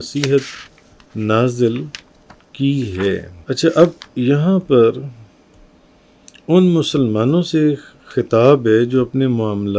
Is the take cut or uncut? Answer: cut